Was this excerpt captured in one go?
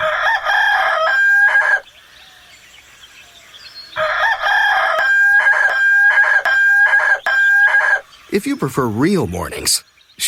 yes; 0 cuts

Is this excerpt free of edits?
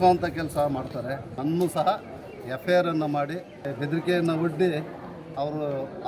no; 2 cuts; at 1.3 s, 3.6 s

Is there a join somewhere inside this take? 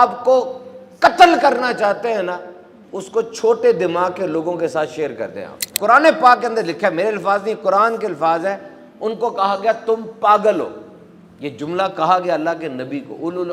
yes; 1 cut; at 5.7 s

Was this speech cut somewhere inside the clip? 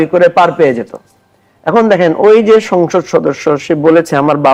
no; 0 cuts

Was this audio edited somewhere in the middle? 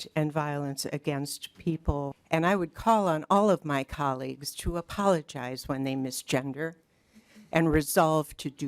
yes; 1 cut; at 2.2 s

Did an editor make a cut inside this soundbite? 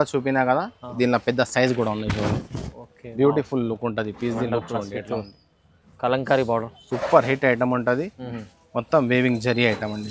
no; 0 cuts

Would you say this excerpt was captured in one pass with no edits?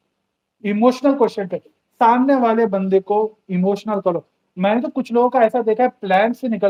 yes; 0 cuts

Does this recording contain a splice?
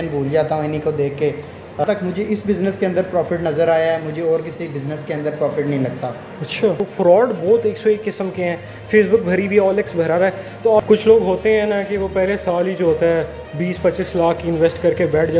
yes; 3 cuts; at 1.8 s, 6.8 s, 10.8 s

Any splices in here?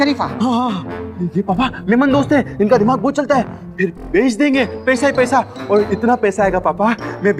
no; 0 cuts

